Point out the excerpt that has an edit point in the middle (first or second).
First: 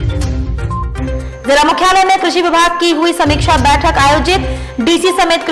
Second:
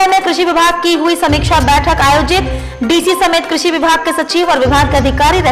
first